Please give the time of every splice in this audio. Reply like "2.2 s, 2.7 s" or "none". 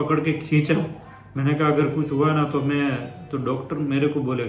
none